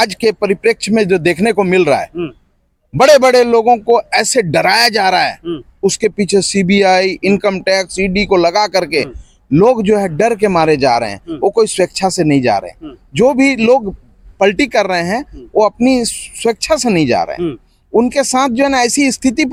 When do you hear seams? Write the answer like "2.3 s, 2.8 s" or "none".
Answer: none